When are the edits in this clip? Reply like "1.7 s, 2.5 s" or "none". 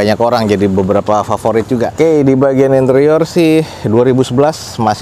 1.9 s